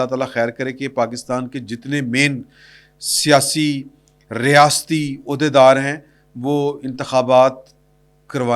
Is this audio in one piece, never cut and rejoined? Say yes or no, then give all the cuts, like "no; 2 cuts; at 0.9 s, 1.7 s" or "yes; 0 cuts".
yes; 0 cuts